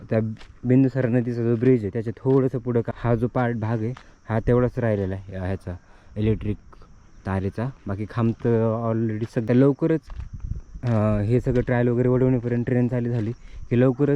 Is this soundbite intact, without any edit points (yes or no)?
no